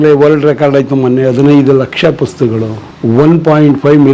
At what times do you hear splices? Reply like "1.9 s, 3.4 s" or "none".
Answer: 2.8 s